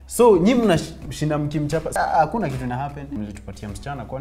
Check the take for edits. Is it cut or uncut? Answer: cut